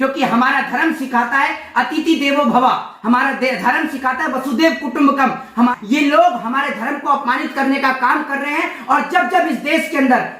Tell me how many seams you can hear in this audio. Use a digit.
1